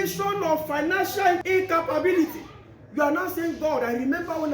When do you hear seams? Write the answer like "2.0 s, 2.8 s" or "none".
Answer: 1.4 s